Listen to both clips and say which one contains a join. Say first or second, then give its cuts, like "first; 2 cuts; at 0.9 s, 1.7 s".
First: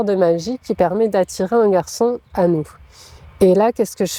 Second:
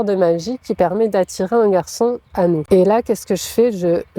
second; 1 cut; at 2.6 s